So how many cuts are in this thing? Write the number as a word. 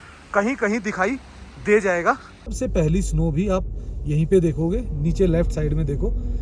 one